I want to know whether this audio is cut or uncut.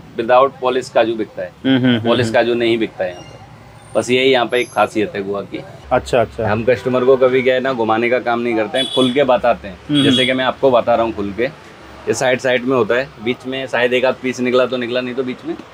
cut